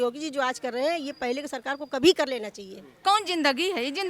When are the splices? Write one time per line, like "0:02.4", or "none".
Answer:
0:03.0